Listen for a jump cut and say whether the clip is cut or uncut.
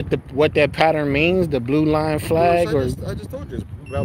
uncut